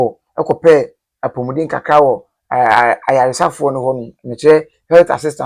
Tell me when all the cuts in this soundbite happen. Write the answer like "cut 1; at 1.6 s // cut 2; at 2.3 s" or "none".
none